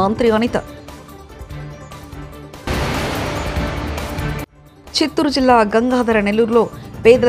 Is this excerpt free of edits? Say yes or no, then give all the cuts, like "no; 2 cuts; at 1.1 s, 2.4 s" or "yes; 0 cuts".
yes; 0 cuts